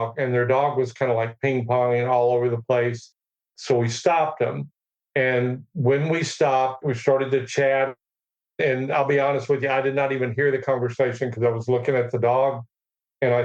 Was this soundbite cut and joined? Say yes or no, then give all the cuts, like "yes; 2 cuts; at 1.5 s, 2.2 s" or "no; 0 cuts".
yes; 2 cuts; at 3.5 s, 6.8 s